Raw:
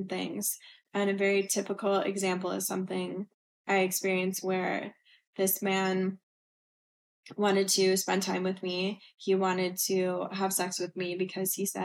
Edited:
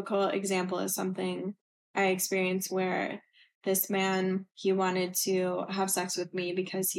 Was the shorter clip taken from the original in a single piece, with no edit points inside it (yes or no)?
no